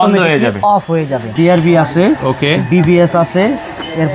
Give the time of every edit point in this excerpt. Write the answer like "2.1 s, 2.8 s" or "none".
1.3 s